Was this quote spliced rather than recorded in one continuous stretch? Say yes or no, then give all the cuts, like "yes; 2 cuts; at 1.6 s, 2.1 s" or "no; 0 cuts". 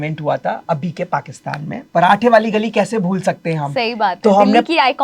yes; 1 cut; at 1.8 s